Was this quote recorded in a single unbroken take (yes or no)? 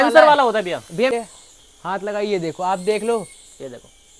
no